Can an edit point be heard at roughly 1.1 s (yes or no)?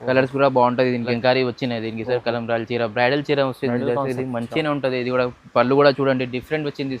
yes